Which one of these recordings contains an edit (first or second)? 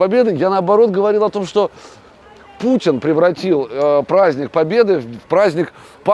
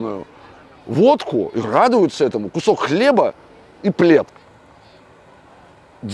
second